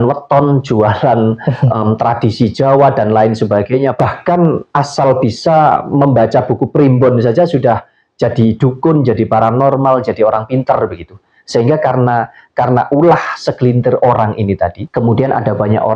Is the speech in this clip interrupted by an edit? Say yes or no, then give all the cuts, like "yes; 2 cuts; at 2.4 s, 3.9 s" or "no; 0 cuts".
yes; 2 cuts; at 4.6 s, 14.8 s